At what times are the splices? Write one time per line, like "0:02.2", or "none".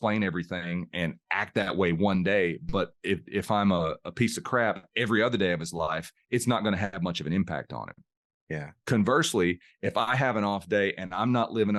none